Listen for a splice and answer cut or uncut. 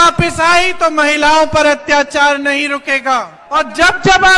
cut